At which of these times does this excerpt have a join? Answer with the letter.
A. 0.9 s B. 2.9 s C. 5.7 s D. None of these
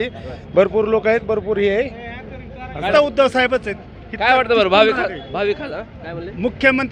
B